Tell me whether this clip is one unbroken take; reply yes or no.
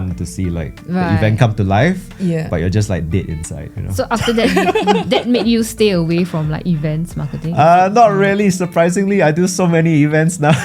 yes